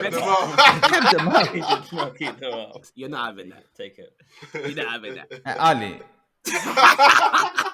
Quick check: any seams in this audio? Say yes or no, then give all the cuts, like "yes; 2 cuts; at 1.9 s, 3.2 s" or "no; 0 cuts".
yes; 1 cut; at 2.8 s